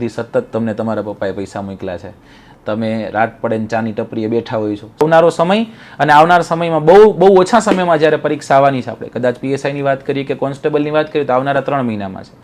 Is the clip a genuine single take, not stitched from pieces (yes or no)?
no